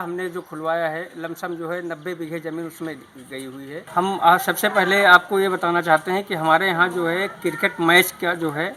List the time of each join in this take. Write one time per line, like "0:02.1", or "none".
0:03.8

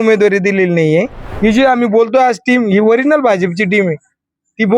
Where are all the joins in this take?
0:01.3

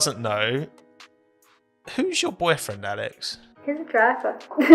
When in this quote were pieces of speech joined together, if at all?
0:03.5

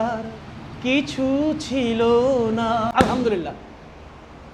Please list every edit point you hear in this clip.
0:02.9

